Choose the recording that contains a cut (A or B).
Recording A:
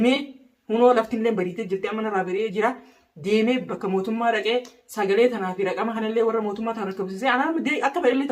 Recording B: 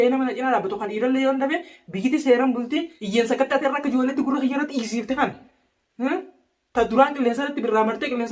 B